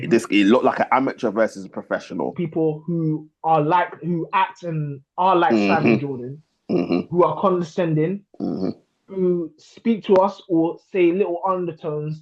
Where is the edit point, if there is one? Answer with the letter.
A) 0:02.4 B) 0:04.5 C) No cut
A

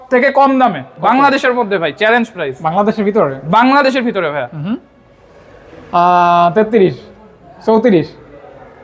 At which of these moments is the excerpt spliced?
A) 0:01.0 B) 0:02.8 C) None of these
C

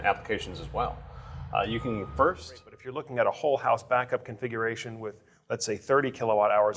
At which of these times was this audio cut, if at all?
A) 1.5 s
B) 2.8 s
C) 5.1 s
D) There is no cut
B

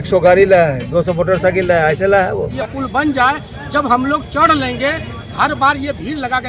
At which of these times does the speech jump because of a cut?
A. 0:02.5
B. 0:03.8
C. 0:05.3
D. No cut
A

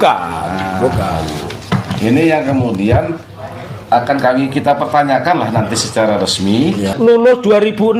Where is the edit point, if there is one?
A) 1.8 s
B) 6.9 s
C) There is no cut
B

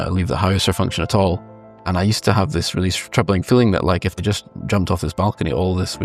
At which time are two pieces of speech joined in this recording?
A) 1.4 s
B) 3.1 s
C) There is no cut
A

